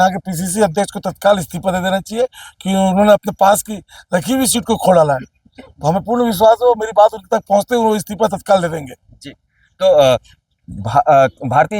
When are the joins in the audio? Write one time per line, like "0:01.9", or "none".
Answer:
none

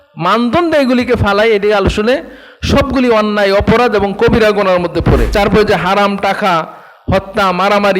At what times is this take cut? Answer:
0:05.3

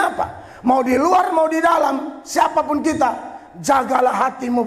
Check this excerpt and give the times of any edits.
none

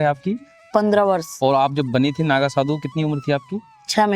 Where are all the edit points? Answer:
none

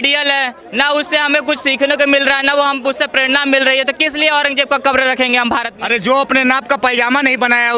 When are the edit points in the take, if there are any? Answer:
0:05.7

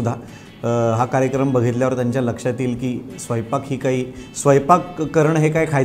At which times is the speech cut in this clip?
none

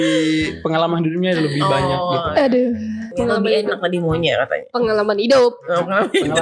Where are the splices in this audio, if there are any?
0:03.0

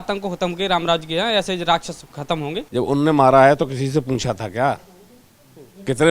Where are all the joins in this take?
0:02.7

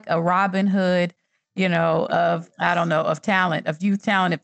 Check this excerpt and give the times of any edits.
0:02.5

